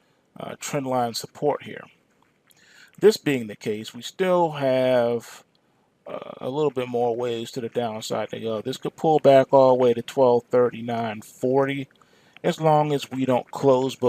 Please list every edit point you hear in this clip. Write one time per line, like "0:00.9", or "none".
0:08.4